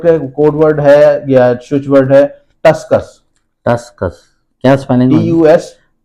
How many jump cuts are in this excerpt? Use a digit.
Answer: 0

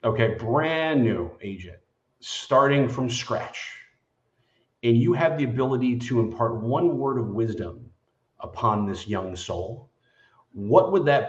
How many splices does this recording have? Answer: 0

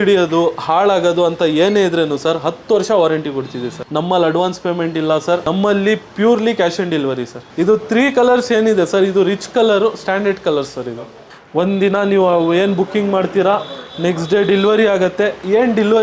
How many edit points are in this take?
3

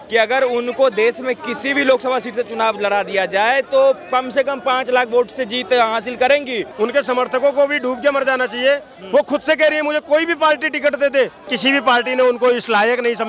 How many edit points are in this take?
2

